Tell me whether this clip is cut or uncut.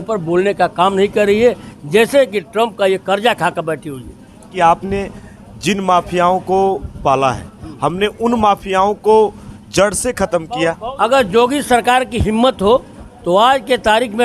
cut